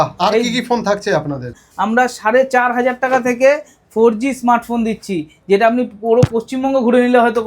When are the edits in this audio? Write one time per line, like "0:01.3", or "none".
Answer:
0:01.5